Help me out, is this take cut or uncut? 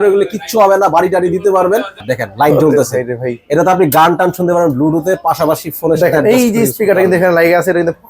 cut